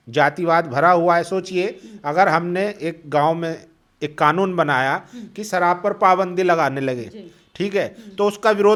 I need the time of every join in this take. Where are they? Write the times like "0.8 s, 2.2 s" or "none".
none